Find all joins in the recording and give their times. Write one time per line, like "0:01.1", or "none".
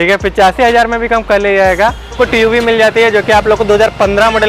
0:02.2